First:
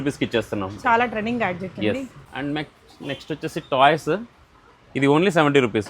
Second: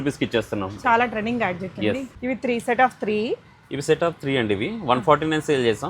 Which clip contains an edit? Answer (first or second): second